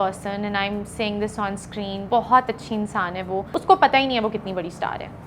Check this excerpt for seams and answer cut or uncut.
cut